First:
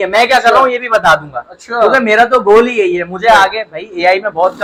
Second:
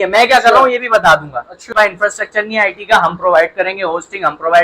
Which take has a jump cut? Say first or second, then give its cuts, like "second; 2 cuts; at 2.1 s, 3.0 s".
second; 1 cut; at 1.7 s